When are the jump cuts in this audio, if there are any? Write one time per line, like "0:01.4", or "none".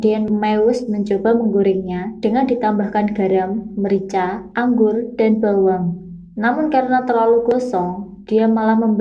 none